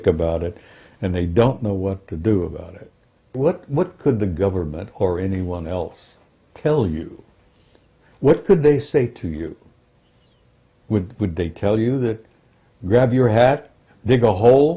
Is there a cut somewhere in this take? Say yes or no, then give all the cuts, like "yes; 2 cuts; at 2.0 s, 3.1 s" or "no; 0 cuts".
yes; 1 cut; at 3.3 s